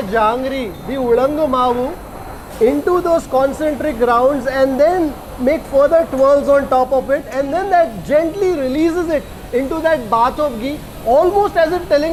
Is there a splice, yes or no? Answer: no